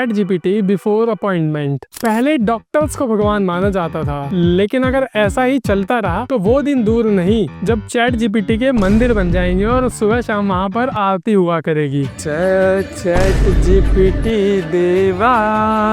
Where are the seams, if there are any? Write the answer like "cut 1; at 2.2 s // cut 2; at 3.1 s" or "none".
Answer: none